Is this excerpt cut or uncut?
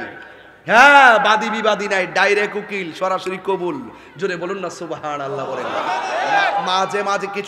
cut